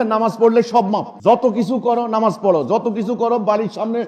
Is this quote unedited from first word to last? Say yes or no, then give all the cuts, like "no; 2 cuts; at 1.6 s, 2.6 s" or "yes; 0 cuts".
no; 1 cut; at 1.1 s